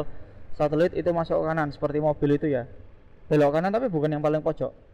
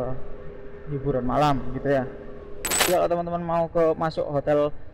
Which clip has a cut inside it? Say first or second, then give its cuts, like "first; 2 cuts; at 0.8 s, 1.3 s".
second; 1 cut; at 2.9 s